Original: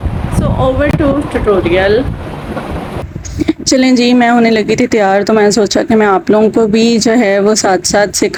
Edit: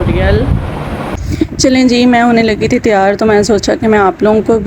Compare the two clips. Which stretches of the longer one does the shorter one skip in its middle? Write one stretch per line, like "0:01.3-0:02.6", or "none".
0:02.7-0:03.2